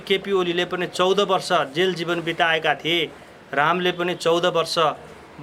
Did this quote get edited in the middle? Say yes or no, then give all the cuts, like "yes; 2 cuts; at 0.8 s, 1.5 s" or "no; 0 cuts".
no; 0 cuts